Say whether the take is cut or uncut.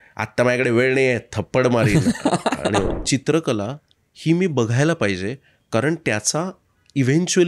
cut